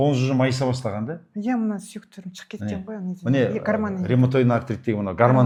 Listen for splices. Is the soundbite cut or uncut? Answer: uncut